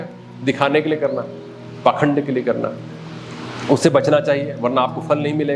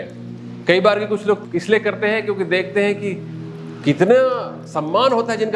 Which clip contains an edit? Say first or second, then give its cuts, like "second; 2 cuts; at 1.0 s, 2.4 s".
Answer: second; 1 cut; at 1.4 s